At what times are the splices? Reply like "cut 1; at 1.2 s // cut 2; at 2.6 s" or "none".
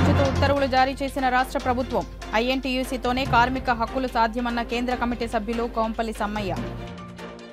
none